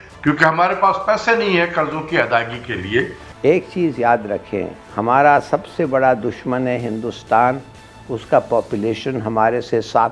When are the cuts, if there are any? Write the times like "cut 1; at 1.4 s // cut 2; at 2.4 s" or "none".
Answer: cut 1; at 3.2 s